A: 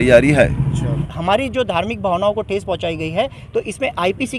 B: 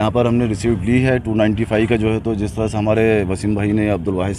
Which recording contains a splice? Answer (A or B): A